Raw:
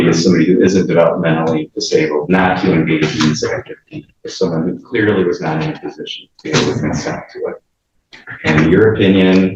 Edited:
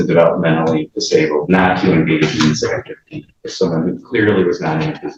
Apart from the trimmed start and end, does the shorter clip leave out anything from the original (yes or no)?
no